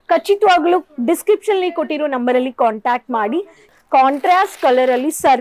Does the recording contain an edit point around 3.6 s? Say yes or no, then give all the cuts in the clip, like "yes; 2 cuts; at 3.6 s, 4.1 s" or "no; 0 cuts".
yes; 1 cut; at 3.6 s